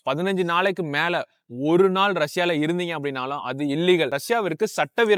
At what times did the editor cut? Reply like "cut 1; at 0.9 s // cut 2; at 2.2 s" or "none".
none